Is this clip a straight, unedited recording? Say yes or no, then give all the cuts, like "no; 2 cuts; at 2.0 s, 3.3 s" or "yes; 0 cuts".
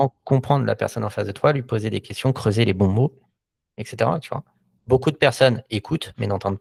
yes; 0 cuts